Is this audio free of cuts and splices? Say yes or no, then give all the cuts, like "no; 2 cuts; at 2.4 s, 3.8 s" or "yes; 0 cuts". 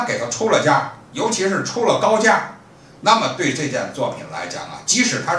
yes; 0 cuts